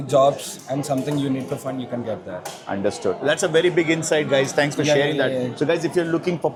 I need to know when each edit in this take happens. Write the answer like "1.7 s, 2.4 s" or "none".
none